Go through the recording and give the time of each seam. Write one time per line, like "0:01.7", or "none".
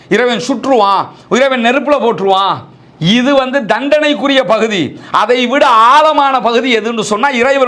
none